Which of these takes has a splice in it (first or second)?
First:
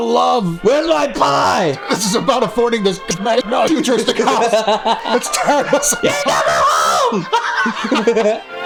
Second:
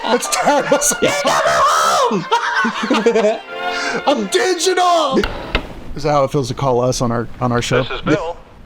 second